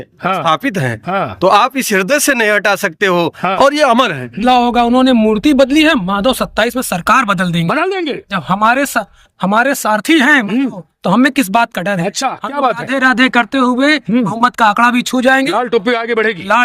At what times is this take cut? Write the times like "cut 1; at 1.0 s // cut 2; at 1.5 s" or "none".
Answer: cut 1; at 3.5 s // cut 2; at 4.3 s